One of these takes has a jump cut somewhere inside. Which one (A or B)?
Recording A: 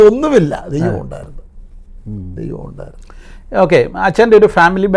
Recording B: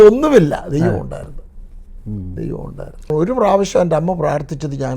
B